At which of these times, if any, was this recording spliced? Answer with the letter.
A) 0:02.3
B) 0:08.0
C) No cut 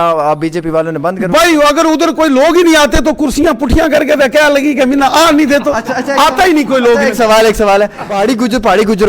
B